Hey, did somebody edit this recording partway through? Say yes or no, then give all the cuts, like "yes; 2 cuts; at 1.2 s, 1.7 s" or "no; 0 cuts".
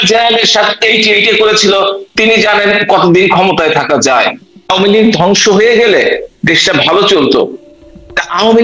yes; 1 cut; at 4.7 s